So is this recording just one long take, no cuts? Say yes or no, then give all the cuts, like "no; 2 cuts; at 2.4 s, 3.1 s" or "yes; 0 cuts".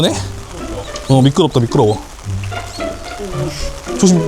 no; 2 cuts; at 2.2 s, 3.2 s